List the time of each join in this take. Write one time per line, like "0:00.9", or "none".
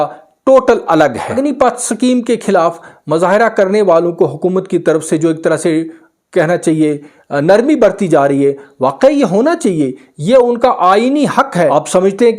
0:01.2
0:11.5